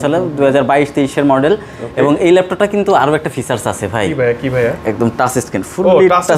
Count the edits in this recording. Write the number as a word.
zero